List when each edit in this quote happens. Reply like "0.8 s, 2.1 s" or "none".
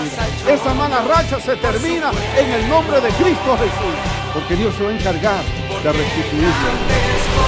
none